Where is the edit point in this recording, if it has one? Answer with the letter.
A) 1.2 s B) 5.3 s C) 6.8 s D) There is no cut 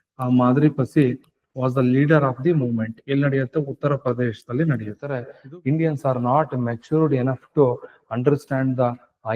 B